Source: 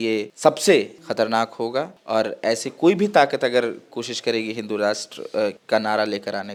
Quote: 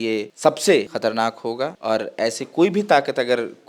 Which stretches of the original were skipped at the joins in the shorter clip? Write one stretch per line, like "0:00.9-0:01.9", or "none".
0:01.2-0:01.4

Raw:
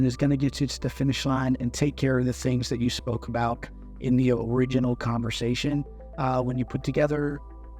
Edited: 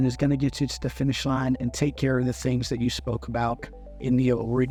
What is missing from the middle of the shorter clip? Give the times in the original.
none

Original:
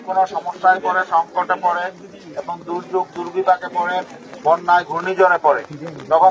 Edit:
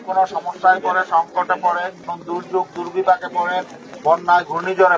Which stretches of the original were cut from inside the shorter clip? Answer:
0:02.1-0:02.5

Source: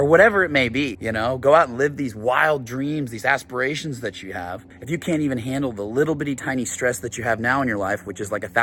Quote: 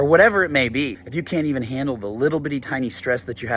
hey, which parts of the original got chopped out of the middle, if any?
0:01.0-0:04.7

